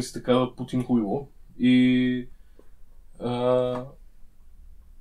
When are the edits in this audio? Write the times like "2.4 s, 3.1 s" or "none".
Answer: none